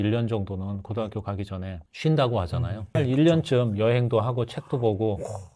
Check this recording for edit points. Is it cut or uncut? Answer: cut